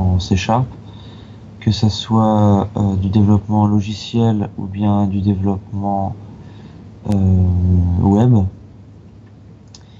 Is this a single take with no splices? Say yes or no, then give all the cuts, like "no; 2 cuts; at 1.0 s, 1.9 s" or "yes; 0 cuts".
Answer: yes; 0 cuts